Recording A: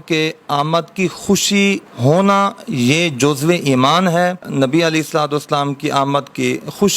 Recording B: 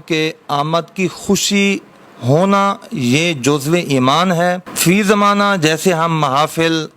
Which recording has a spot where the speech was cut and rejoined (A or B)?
A